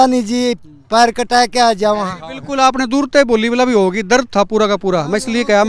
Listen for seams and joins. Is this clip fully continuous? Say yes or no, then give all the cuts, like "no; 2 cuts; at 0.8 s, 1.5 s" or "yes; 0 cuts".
yes; 0 cuts